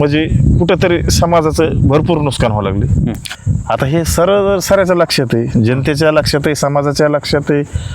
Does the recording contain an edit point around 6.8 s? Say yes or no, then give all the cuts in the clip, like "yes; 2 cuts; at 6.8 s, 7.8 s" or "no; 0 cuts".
no; 1 cut; at 3.3 s